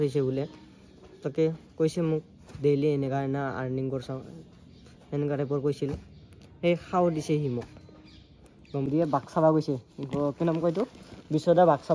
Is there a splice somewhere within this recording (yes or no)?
yes